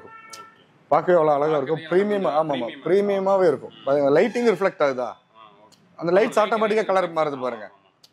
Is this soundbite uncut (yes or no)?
yes